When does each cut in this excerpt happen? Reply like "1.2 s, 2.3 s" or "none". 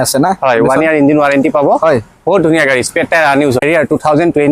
3.6 s